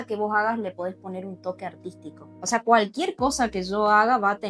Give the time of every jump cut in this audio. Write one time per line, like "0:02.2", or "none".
0:02.3